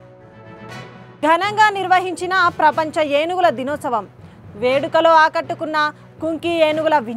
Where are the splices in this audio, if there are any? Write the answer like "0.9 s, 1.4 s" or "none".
0.9 s